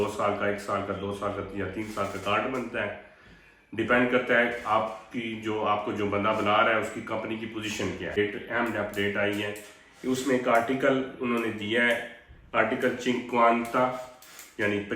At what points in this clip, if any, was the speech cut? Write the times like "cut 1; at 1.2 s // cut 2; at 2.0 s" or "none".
cut 1; at 8.2 s